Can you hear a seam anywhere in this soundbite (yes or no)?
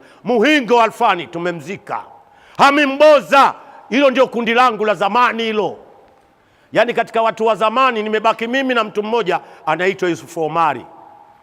no